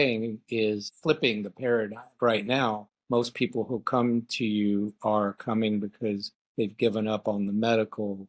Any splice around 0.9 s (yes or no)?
yes